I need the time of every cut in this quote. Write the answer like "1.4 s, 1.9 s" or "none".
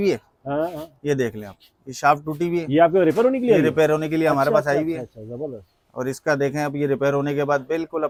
none